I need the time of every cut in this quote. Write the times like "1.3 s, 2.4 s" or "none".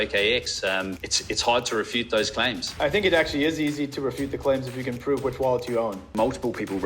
1.1 s, 2.7 s, 6.0 s